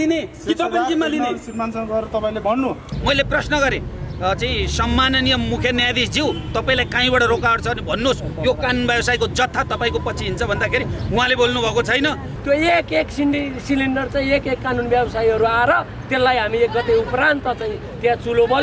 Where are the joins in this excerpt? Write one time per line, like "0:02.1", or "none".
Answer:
0:02.9
0:12.3